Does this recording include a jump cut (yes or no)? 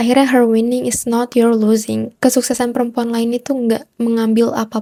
no